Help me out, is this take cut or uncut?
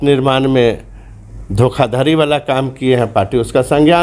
uncut